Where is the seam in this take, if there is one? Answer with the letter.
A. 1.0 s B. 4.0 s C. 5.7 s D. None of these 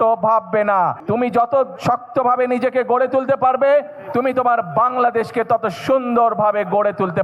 A